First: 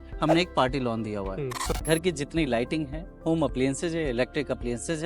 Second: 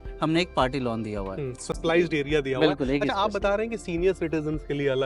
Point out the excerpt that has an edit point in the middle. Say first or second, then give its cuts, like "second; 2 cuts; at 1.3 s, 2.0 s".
first; 1 cut; at 1.7 s